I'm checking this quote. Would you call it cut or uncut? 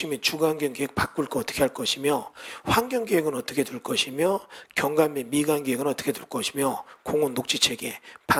uncut